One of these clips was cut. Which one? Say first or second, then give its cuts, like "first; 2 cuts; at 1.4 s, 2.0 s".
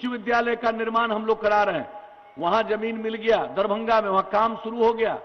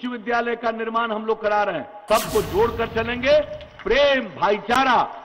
second; 1 cut; at 2.0 s